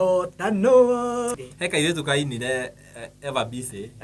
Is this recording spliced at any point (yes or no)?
yes